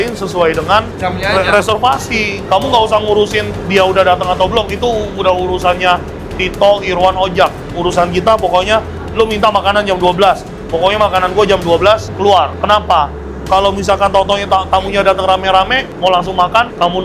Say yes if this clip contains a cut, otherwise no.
no